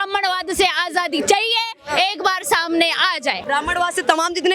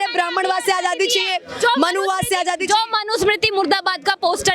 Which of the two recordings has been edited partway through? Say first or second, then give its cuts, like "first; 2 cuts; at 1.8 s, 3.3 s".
first; 1 cut; at 3.4 s